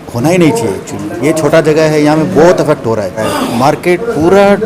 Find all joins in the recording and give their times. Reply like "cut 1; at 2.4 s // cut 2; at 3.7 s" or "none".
cut 1; at 3.2 s